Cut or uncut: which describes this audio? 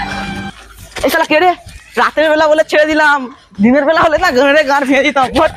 uncut